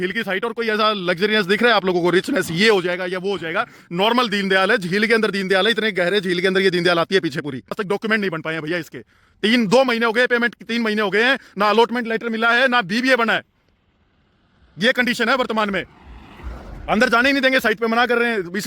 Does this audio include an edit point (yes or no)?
yes